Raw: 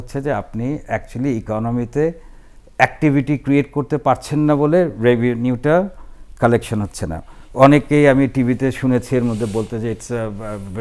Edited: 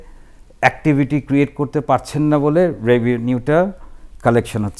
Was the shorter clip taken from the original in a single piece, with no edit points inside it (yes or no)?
yes